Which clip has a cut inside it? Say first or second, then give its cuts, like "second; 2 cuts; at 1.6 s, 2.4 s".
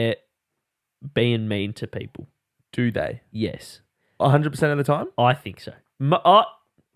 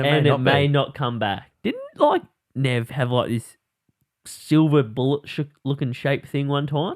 second; 1 cut; at 1.4 s